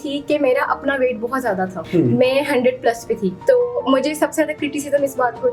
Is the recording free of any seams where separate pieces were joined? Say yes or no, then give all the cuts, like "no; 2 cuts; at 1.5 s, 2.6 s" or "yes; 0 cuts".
no; 2 cuts; at 1.8 s, 3.4 s